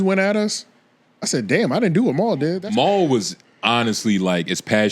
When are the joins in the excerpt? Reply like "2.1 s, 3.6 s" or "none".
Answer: 2.6 s